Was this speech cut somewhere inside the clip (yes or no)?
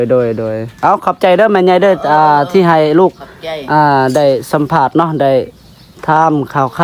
no